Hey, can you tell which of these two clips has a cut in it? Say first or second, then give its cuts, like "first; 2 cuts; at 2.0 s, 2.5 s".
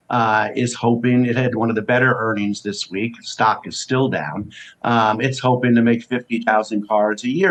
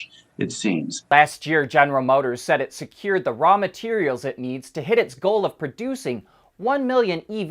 second; 1 cut; at 1.0 s